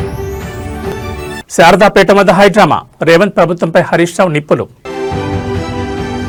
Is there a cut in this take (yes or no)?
no